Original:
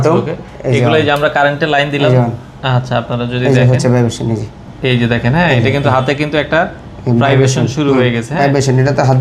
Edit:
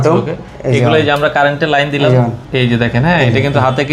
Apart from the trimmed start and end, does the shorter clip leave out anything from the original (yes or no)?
yes